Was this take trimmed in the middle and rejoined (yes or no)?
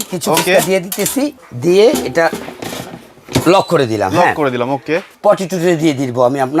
yes